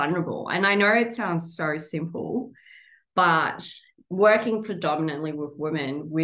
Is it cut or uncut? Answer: uncut